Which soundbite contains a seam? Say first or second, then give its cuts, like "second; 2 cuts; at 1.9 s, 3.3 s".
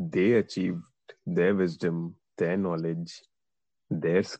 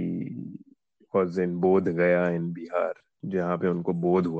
second; 1 cut; at 3.1 s